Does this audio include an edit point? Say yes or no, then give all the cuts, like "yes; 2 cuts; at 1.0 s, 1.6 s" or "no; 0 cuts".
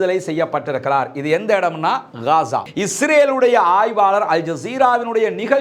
yes; 1 cut; at 2.7 s